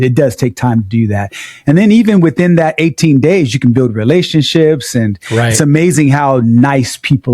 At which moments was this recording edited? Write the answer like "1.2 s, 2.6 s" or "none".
none